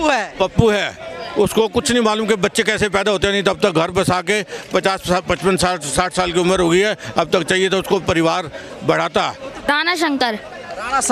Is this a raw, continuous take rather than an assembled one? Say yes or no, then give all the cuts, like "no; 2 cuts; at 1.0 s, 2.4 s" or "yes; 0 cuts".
no; 1 cut; at 9.7 s